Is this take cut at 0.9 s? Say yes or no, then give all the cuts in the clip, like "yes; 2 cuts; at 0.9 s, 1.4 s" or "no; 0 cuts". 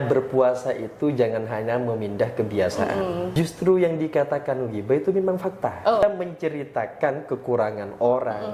no; 2 cuts; at 3.3 s, 6.0 s